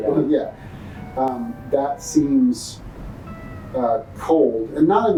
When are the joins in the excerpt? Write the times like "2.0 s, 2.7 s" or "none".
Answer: none